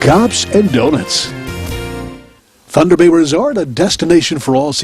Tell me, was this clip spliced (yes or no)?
yes